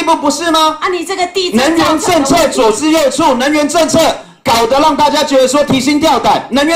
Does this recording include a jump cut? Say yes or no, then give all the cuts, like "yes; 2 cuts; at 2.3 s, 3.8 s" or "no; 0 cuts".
no; 0 cuts